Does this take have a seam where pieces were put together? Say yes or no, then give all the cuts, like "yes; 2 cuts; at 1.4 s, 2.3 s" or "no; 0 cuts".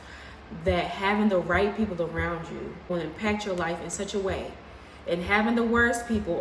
yes; 1 cut; at 2.9 s